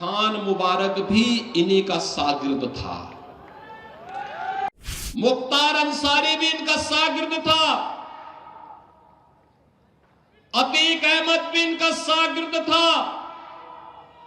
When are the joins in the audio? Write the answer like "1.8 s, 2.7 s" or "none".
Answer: 4.7 s